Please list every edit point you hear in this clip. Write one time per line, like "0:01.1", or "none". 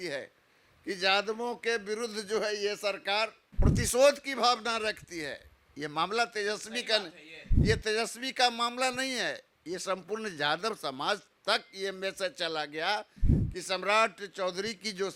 0:03.5

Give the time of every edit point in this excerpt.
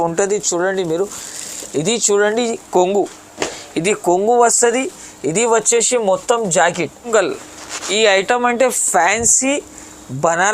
0:07.1

